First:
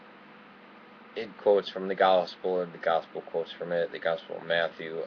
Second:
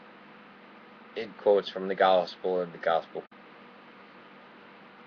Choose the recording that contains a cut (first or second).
first